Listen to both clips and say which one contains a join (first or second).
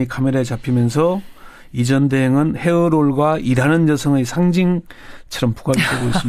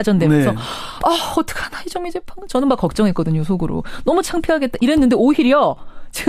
first